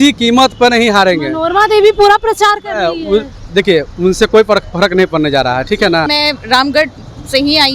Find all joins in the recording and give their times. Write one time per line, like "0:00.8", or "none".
0:06.1